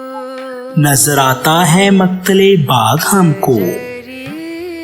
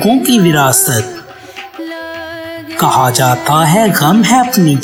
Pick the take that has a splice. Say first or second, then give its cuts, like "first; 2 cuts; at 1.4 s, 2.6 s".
first; 2 cuts; at 0.7 s, 3.8 s